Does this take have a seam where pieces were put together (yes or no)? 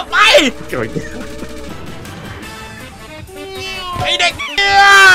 no